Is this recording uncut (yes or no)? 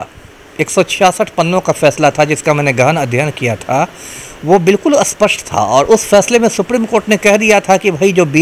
yes